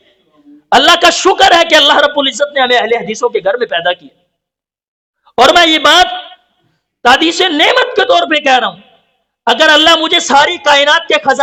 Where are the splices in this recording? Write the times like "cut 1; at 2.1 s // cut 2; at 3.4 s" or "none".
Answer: none